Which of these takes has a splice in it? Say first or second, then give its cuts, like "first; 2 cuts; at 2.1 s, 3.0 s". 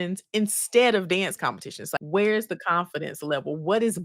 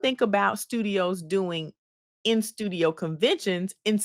first; 1 cut; at 1.8 s